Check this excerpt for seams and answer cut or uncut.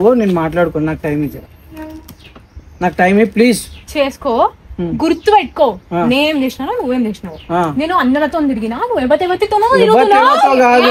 uncut